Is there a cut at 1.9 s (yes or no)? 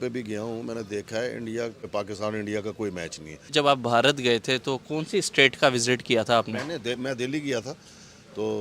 yes